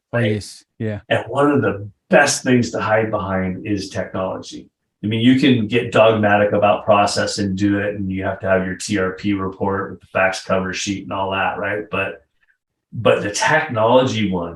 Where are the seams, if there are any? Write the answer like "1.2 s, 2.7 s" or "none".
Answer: 4.7 s